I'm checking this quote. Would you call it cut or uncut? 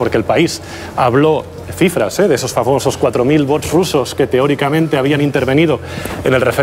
uncut